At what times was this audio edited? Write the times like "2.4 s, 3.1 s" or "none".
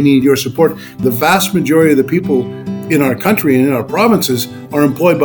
none